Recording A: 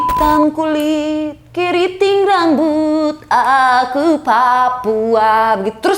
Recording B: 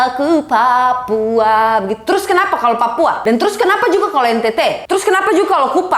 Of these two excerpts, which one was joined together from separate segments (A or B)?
B